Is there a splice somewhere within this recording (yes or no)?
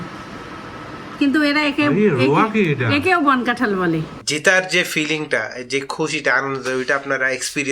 yes